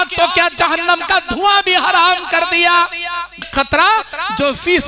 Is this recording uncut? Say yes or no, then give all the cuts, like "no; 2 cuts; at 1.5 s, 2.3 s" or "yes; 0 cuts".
no; 1 cut; at 3.5 s